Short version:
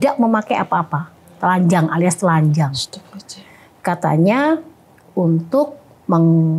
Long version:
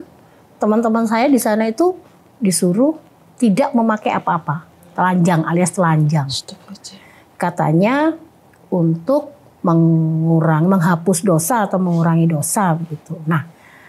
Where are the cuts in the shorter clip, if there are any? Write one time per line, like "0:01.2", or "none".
none